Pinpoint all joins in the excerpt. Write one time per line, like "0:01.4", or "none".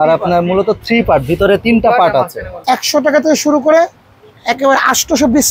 0:02.6